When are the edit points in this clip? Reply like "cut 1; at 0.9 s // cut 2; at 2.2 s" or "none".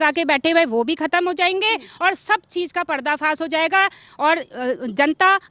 none